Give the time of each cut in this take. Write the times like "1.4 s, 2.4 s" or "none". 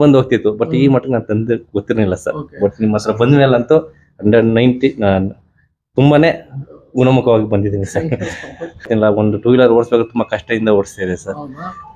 8.9 s